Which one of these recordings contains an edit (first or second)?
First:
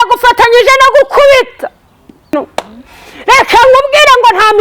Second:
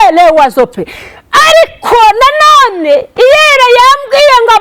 first